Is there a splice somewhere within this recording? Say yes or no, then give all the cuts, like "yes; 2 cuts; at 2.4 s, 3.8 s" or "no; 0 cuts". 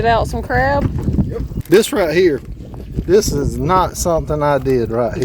yes; 1 cut; at 1.5 s